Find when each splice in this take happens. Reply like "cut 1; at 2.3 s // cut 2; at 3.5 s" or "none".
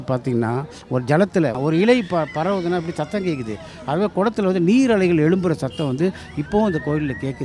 cut 1; at 1.6 s